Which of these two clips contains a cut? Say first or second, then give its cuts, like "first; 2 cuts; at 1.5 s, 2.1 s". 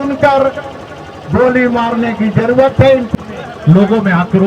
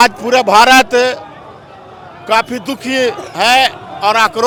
first; 1 cut; at 3.1 s